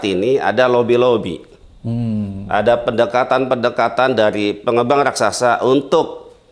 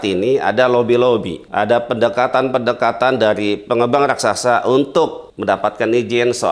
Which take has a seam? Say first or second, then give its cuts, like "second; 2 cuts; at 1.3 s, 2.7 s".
second; 2 cuts; at 1.4 s, 5.3 s